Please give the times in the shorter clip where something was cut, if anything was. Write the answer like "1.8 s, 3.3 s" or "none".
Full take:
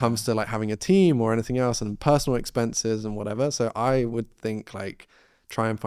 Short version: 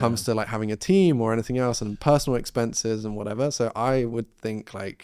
none